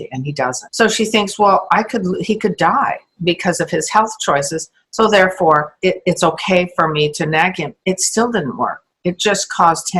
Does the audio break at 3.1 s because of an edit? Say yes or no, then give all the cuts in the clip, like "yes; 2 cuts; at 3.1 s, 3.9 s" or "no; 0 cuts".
yes; 1 cut; at 3.1 s